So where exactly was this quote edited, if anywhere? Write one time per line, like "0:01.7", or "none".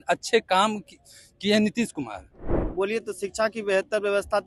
0:02.6